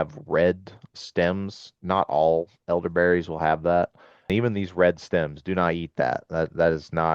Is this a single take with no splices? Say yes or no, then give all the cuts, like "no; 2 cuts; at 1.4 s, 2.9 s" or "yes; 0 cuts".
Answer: no; 1 cut; at 4.3 s